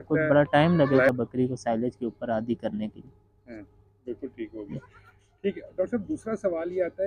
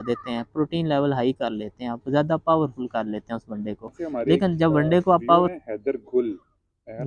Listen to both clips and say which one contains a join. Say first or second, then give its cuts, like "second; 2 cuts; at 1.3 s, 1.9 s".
second; 1 cut; at 5.5 s